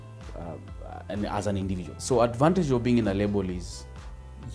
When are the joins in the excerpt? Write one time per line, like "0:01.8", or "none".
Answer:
0:01.9

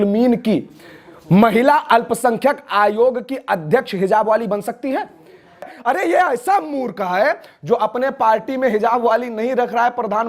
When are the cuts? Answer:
0:05.7

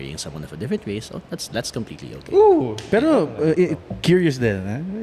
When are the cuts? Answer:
none

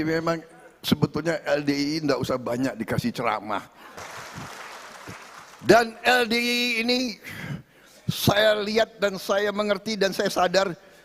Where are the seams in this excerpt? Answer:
0:03.9

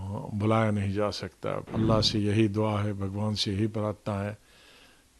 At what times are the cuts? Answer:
0:01.7

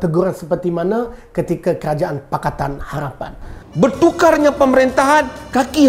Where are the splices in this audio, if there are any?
0:03.4

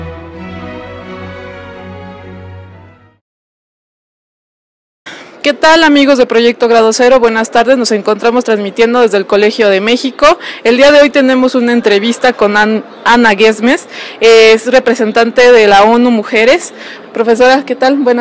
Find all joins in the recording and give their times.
0:01.2

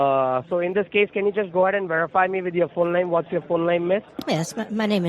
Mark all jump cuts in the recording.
none

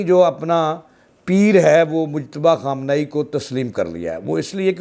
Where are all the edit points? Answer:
none

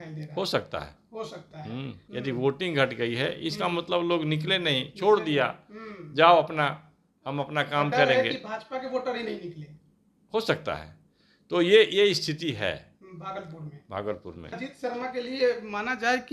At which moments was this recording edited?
0:02.0
0:14.6

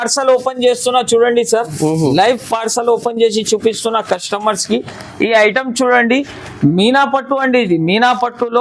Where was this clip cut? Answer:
none

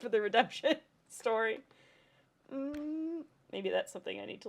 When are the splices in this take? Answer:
none

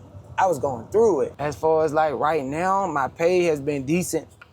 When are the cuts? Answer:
0:01.4

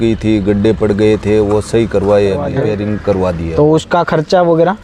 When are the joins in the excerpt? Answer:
0:02.5

